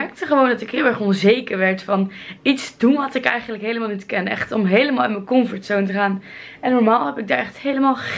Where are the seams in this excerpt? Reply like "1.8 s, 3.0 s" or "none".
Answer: none